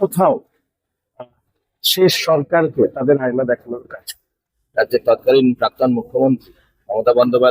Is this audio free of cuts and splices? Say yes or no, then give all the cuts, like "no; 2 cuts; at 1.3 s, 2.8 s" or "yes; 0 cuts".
no; 1 cut; at 4.4 s